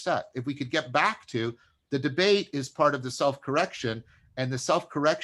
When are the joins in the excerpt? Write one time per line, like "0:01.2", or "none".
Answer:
0:01.7